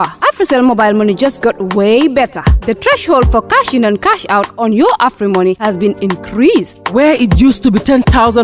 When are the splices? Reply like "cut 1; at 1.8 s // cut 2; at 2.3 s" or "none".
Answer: none